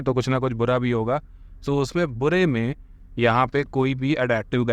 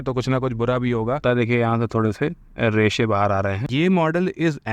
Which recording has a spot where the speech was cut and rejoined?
second; 2 cuts; at 1.2 s, 3.7 s

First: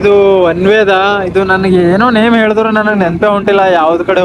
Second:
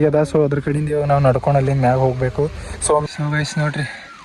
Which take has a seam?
second; 1 cut; at 3.0 s

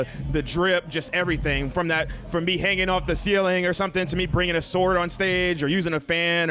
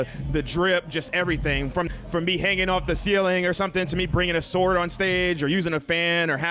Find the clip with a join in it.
second; 1 cut; at 1.9 s

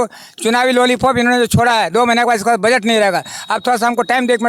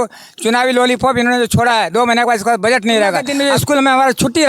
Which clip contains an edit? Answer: second; 1 cut; at 3.3 s

